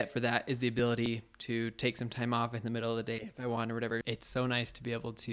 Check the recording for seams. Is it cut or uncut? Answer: cut